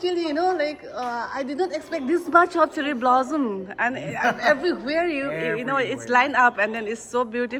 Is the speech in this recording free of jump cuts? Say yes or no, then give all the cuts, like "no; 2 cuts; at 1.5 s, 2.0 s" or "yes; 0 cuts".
yes; 0 cuts